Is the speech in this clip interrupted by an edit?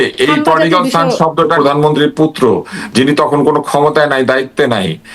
yes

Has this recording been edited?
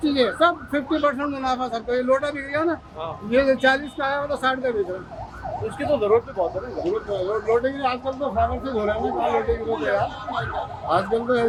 no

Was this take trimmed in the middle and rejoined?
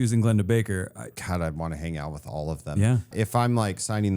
yes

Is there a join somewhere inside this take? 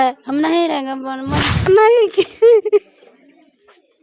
yes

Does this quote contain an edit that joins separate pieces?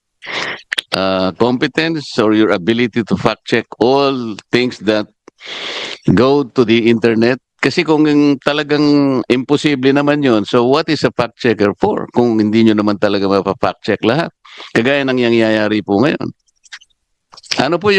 no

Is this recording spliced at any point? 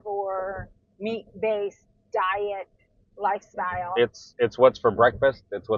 no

